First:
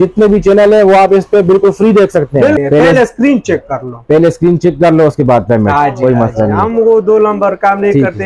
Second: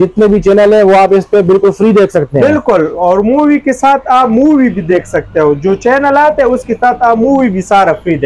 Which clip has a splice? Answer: first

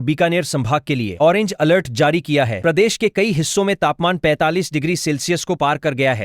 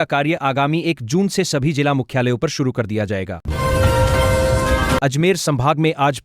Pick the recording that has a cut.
second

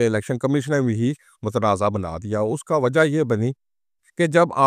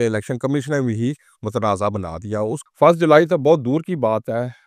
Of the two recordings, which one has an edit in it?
second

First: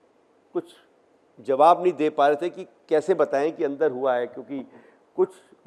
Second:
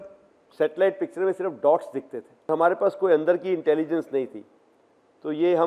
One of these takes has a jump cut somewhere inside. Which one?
second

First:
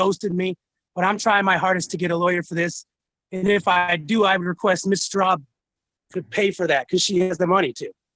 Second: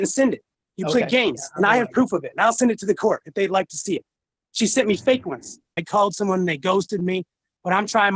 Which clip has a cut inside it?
second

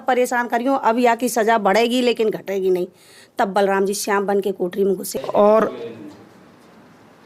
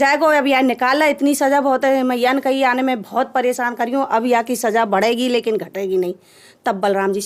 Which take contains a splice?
first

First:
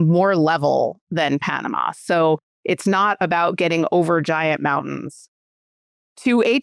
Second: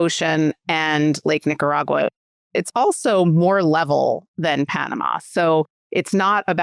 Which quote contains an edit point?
first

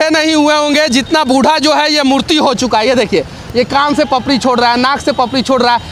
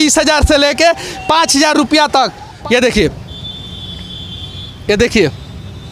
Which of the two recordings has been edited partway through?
second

